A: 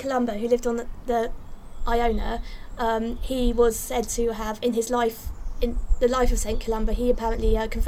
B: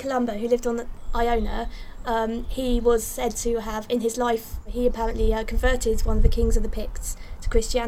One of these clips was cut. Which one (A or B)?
B